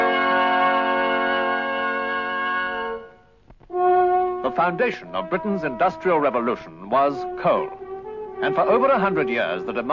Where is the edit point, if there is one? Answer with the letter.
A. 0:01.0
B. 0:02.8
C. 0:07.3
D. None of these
A